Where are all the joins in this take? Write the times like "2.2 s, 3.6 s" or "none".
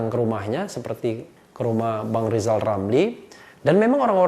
none